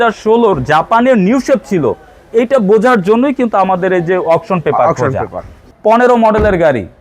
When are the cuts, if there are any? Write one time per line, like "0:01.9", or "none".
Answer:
0:05.7